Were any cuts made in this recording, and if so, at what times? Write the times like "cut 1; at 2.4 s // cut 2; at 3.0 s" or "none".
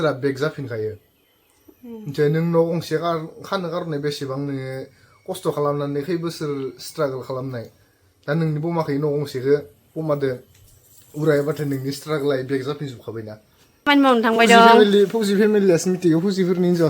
cut 1; at 13.9 s